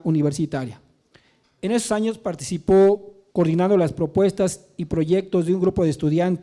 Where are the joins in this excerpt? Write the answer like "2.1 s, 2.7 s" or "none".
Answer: 0.9 s